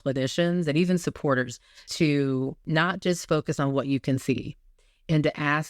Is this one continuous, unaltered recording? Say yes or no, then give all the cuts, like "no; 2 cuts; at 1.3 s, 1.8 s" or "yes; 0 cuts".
no; 1 cut; at 1.9 s